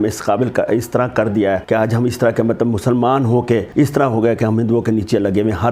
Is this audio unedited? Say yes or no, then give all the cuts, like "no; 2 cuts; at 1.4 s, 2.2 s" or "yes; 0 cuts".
no; 2 cuts; at 1.6 s, 3.7 s